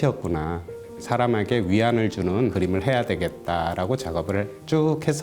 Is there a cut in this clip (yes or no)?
yes